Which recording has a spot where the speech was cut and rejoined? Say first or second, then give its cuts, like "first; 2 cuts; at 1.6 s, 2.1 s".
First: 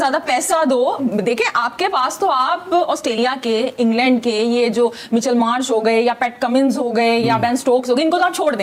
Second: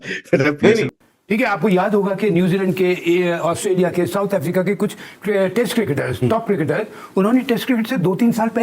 second; 1 cut; at 1.0 s